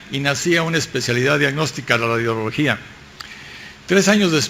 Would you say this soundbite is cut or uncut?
cut